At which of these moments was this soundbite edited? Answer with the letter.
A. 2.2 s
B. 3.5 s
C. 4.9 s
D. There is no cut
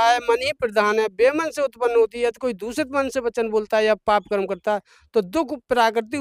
D